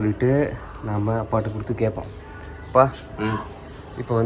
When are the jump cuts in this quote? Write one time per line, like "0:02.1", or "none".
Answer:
none